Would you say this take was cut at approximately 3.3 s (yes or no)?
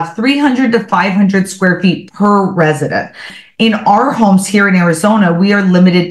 yes